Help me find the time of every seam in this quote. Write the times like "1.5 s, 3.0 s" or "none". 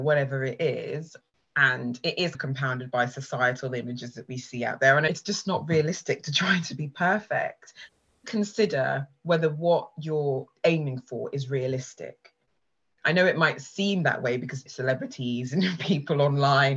1.1 s, 5.1 s, 7.9 s